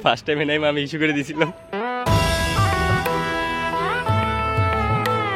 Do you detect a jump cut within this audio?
no; 0 cuts

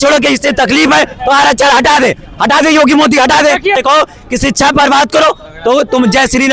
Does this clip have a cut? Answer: yes; 1 cut; at 3.7 s

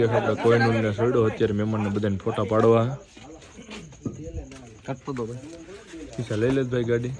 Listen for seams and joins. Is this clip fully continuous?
yes; 0 cuts

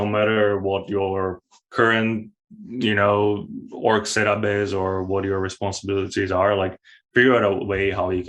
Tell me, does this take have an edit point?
no; 0 cuts

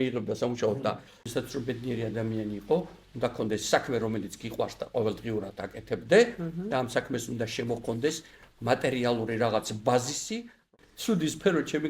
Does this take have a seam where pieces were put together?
yes; 2 cuts; at 1.1 s, 10.7 s

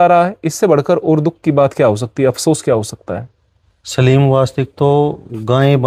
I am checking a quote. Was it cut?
no; 0 cuts

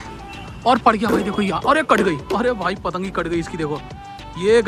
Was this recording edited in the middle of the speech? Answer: no; 0 cuts

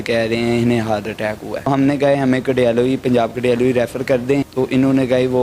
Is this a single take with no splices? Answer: no; 2 cuts; at 1.7 s, 4.5 s

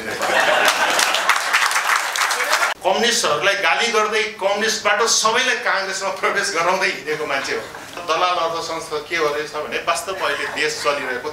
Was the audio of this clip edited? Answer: yes; 2 cuts; at 2.8 s, 8.0 s

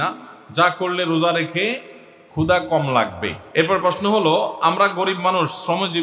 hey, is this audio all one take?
no; 1 cut; at 3.3 s

